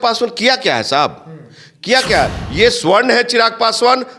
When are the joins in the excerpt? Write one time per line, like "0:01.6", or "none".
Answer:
0:02.4